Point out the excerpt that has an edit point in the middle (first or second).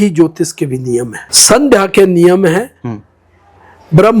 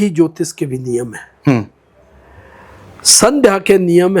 first